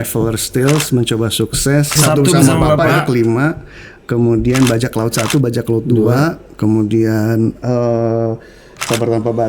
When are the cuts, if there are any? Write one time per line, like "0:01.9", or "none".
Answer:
0:01.9